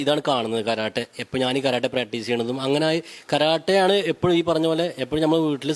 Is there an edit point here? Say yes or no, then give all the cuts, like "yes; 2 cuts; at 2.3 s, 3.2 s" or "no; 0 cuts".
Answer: no; 0 cuts